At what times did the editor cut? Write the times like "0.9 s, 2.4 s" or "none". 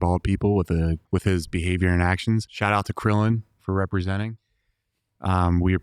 1.0 s, 2.5 s

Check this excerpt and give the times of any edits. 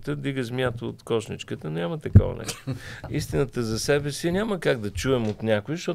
3.1 s

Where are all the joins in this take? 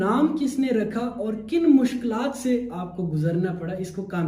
none

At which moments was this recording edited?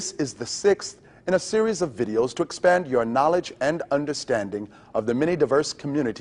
4.0 s

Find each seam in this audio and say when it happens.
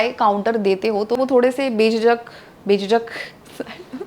1.2 s

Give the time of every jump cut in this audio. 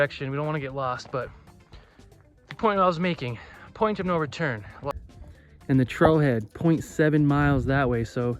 4.9 s

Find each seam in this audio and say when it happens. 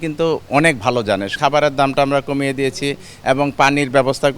1.3 s

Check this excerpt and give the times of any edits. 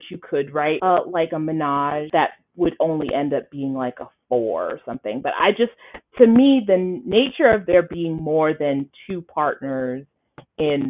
0.8 s, 2.1 s

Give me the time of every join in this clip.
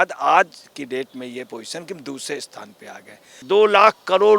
3.4 s

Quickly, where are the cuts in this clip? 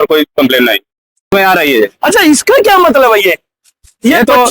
1.2 s

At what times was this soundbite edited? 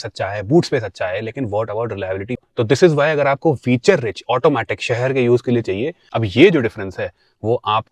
2.4 s, 6.0 s

